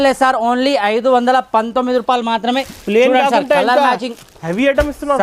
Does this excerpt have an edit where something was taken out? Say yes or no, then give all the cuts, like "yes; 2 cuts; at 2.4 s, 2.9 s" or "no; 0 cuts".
no; 0 cuts